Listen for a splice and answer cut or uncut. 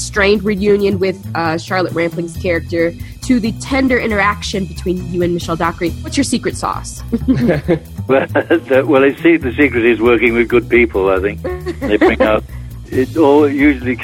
cut